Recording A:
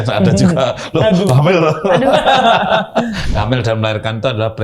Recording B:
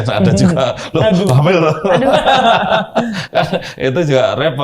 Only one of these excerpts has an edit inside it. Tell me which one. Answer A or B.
A